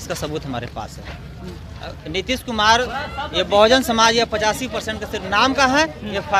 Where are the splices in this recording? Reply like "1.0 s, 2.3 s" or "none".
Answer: none